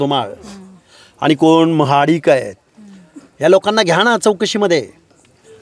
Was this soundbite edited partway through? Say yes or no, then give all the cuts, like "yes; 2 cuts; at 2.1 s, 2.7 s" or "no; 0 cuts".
no; 0 cuts